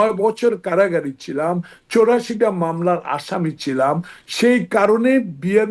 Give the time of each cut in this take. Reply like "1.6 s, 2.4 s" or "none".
none